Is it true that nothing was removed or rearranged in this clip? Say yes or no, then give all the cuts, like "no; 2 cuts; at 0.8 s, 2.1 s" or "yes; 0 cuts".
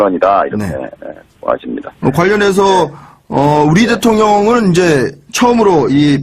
yes; 0 cuts